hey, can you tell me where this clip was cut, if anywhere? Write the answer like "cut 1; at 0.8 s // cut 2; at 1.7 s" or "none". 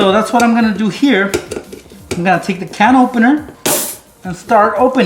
cut 1; at 3.5 s